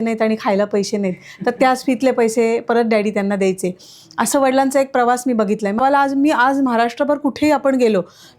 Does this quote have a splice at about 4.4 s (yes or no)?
no